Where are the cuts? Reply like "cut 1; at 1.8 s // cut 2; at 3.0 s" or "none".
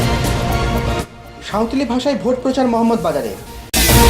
cut 1; at 1.0 s